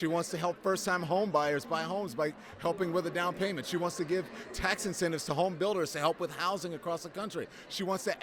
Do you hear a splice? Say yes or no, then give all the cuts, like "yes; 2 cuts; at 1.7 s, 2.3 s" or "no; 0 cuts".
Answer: no; 0 cuts